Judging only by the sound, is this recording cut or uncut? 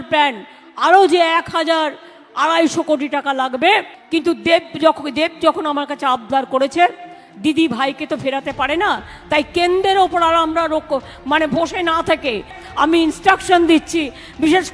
cut